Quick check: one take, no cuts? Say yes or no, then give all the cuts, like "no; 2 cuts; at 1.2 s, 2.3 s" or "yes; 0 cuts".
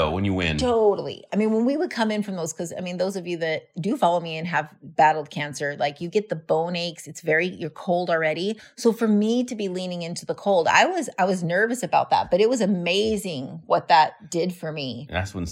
no; 1 cut; at 8.7 s